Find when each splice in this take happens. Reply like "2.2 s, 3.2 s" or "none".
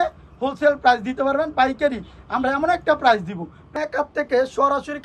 3.7 s